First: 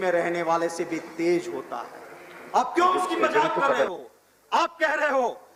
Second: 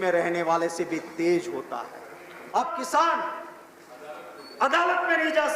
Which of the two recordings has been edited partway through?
second; 1 cut; at 2.7 s

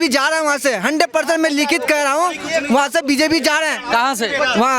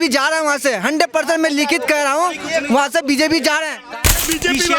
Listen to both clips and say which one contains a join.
second; 1 cut; at 3.8 s

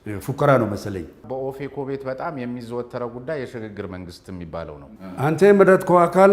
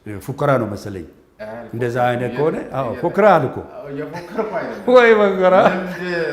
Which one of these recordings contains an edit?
first; 2 cuts; at 1.2 s, 5.0 s

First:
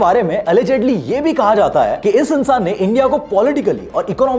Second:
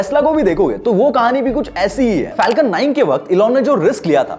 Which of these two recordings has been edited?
second; 1 cut; at 2.3 s

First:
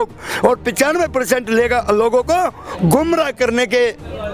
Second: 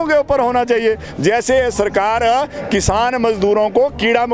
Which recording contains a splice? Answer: second; 1 cut; at 1.1 s

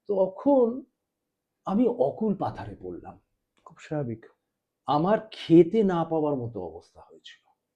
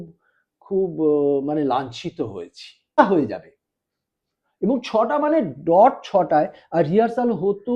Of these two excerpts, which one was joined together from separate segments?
second; 1 cut; at 3.0 s

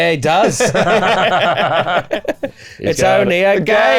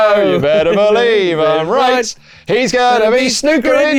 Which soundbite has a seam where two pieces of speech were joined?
first; 1 cut; at 2.1 s

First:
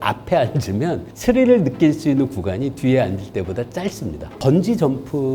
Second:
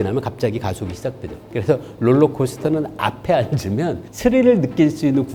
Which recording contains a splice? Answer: first; 1 cut; at 4.4 s

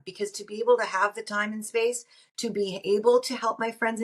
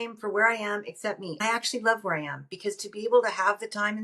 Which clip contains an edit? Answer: second; 1 cut; at 1.4 s

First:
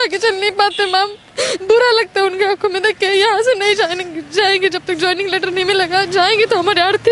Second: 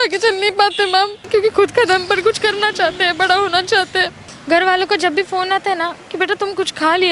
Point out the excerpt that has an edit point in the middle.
second; 2 cuts; at 1.2 s, 4.2 s

